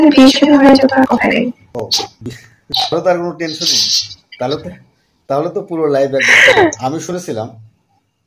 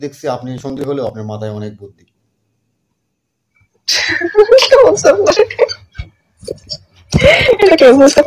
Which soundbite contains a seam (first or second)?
first